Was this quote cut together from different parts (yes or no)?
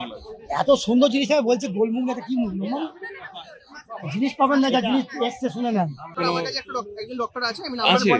yes